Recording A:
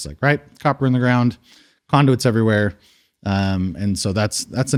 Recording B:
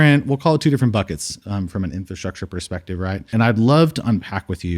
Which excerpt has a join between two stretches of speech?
B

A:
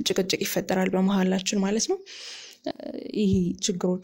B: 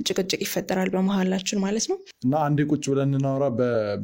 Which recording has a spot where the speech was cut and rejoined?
B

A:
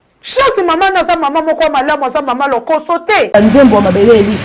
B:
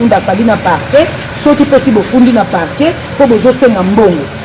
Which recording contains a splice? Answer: A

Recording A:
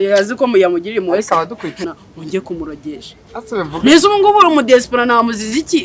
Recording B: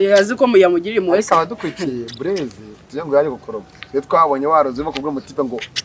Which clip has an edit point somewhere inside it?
A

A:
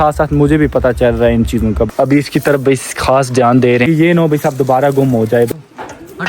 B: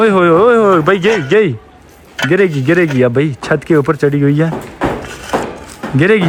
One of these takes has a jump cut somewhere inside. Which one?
A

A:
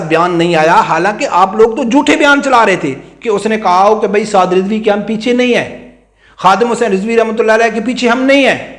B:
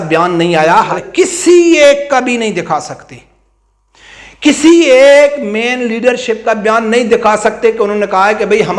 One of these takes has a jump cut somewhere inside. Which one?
B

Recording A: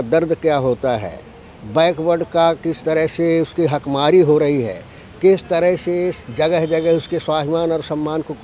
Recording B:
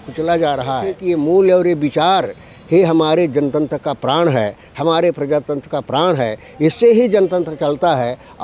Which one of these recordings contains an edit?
B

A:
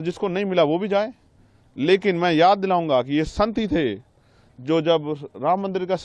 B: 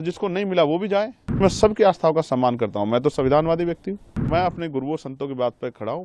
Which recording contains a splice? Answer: B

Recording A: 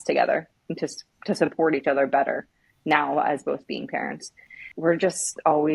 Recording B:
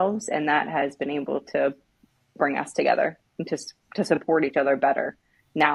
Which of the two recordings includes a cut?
A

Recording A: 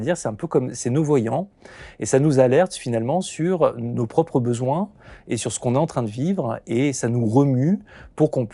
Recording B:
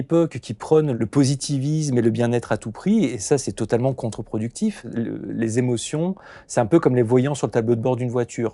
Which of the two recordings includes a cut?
B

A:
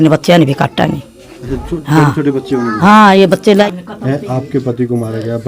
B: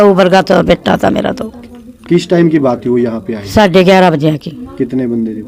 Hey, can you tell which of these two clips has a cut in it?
A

